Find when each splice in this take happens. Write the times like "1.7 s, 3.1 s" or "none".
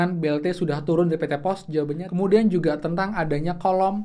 2.0 s